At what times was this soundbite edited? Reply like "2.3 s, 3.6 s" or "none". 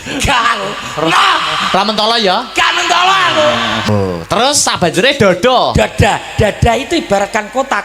3.9 s